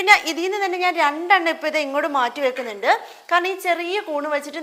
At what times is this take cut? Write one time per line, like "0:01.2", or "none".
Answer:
none